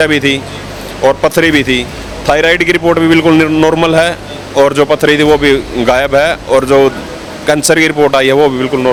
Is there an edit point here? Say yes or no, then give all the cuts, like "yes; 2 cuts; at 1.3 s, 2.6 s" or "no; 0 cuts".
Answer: no; 0 cuts